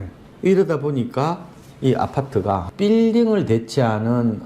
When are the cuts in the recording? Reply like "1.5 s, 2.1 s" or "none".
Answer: 2.7 s